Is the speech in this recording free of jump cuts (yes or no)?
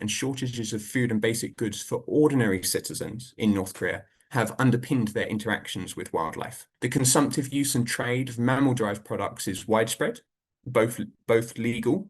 no